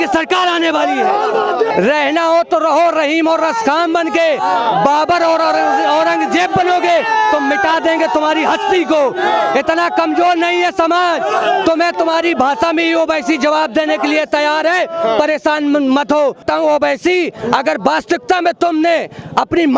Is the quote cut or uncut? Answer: cut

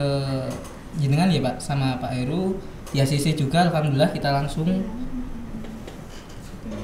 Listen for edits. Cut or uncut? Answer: uncut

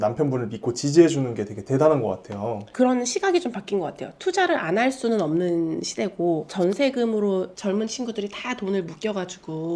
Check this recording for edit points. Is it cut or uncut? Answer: cut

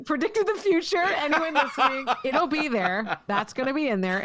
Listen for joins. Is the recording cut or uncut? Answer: uncut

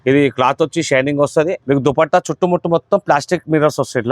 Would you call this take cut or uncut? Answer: cut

